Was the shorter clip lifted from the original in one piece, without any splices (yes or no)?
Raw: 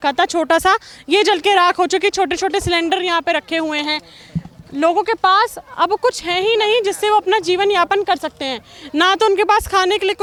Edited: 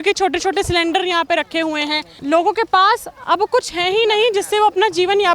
no